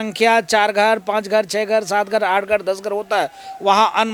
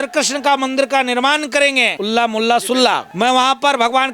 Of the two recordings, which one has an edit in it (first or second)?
second